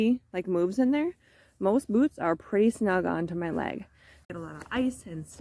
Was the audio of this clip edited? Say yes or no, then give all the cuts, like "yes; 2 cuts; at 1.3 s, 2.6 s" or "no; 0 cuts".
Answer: yes; 1 cut; at 4.3 s